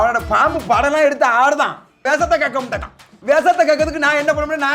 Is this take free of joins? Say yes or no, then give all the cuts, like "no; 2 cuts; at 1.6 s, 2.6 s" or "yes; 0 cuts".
no; 2 cuts; at 2.0 s, 3.1 s